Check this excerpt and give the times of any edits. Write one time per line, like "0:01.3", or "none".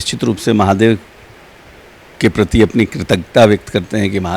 none